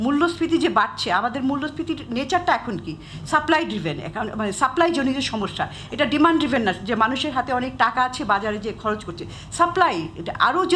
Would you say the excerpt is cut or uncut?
uncut